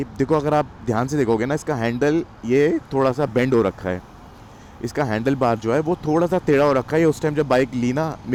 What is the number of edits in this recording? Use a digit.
0